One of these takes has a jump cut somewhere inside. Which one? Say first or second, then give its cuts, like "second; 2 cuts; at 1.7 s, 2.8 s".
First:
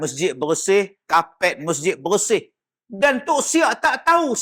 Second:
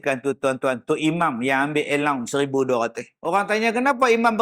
second; 1 cut; at 3.1 s